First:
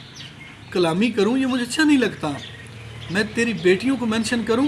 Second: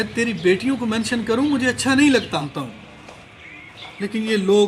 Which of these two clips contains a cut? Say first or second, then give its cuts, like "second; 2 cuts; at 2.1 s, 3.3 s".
second; 1 cut; at 2.5 s